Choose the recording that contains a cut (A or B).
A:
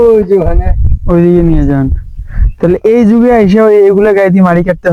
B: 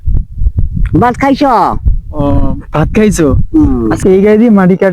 B